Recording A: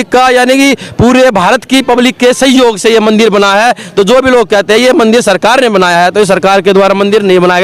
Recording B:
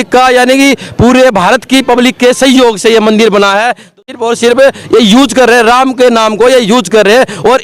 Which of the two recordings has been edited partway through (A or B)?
B